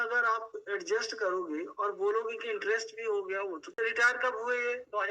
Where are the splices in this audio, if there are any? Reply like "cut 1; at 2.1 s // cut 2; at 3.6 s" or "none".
cut 1; at 3.7 s

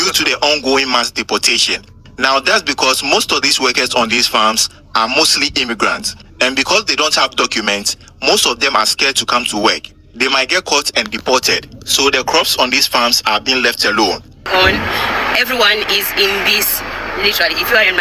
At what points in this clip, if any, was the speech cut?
cut 1; at 14.5 s

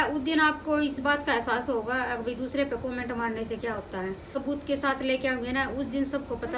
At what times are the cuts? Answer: cut 1; at 4.3 s

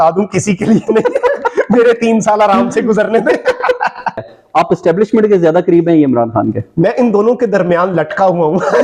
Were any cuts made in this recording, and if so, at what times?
cut 1; at 4.2 s

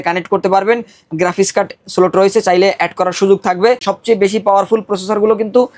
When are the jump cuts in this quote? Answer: cut 1; at 3.9 s

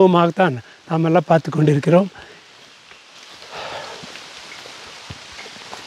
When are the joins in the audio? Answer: none

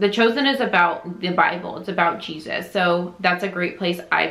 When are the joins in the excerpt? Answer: none

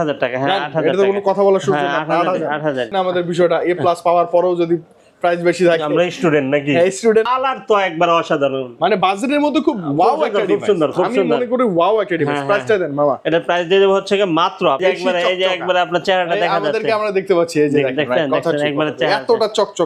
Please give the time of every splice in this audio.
cut 1; at 2.9 s // cut 2; at 7.3 s // cut 3; at 14.8 s

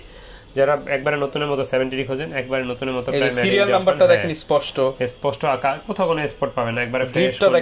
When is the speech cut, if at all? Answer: none

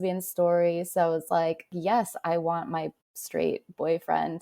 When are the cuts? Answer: cut 1; at 1.7 s

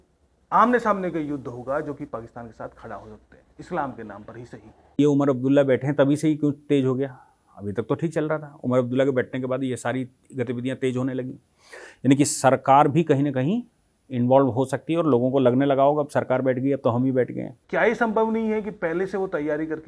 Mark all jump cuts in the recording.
cut 1; at 5.0 s // cut 2; at 17.5 s

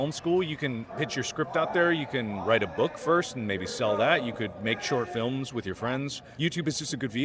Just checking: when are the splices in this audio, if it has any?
cut 1; at 0.9 s // cut 2; at 6.2 s

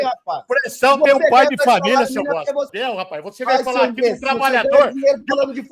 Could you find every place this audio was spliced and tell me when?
cut 1; at 2.7 s

